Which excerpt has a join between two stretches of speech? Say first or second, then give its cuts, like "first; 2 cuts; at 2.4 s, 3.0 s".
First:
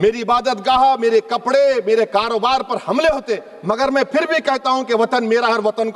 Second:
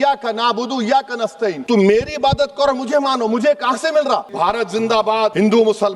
second; 2 cuts; at 1.6 s, 4.8 s